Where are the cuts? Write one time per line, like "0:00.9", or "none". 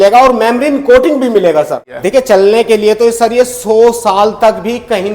0:01.9